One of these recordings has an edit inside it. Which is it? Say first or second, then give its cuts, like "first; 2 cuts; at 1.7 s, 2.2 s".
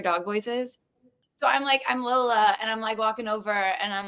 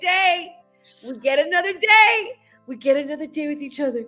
first; 1 cut; at 1.3 s